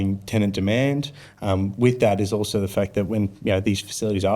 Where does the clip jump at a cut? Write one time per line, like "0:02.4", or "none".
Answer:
none